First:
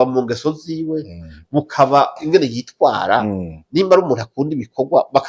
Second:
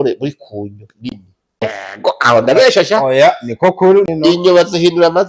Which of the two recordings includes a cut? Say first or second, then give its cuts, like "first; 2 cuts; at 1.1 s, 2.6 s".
second; 2 cuts; at 1.6 s, 4.1 s